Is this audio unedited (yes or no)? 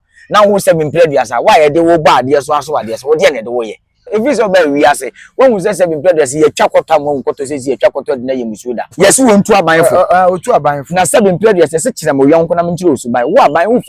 no